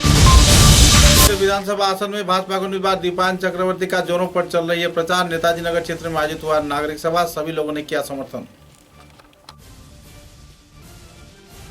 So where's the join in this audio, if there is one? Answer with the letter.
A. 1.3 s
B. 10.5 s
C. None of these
A